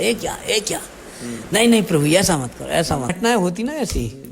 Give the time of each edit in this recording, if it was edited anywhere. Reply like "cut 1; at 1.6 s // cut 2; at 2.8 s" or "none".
cut 1; at 3.2 s